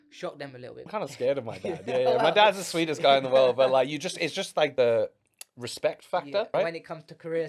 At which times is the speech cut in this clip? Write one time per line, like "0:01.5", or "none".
0:00.9
0:04.7
0:06.5

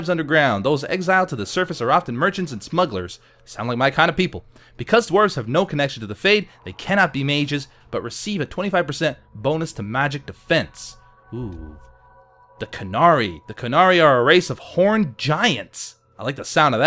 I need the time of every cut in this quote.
0:06.4

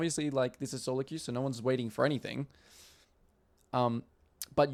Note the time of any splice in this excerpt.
none

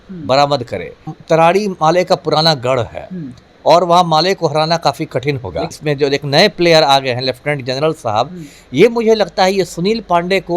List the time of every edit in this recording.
0:01.1
0:05.8

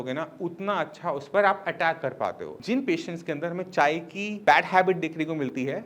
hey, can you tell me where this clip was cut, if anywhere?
0:02.5

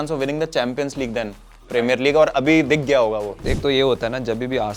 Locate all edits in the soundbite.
0:03.4

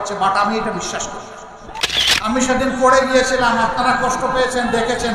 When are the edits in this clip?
0:01.8

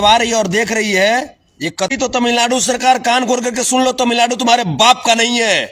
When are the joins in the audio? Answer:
0:01.9

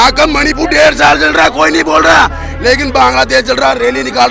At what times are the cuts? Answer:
none

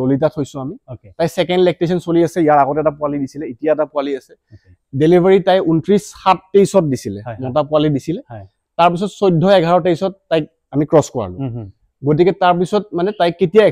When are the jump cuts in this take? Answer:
none

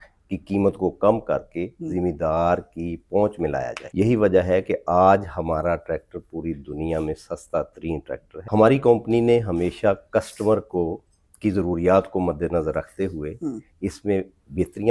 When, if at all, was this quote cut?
0:03.8
0:08.3

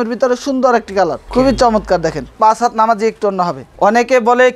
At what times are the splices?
0:01.2
0:02.3
0:03.6

